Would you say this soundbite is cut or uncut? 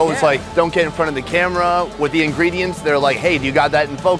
uncut